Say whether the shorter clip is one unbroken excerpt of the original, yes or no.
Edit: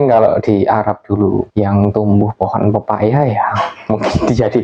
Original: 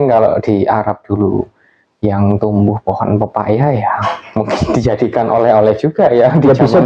no